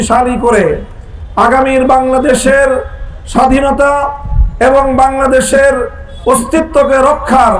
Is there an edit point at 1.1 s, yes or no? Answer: no